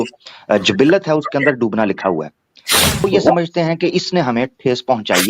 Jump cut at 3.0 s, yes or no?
yes